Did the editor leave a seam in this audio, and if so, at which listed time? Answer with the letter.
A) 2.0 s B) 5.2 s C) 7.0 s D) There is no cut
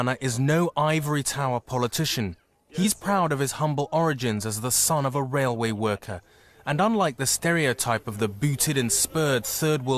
B